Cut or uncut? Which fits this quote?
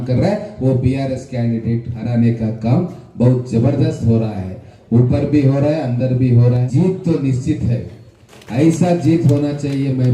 cut